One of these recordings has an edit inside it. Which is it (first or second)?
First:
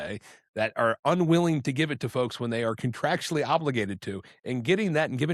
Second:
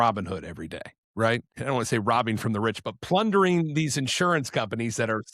second